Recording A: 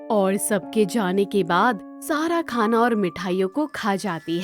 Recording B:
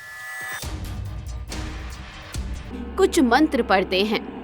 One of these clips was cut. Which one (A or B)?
B